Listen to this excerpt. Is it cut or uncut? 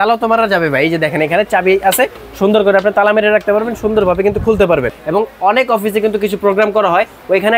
cut